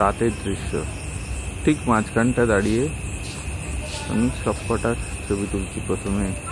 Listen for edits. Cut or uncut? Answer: uncut